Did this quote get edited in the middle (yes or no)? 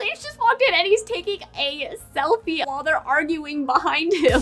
yes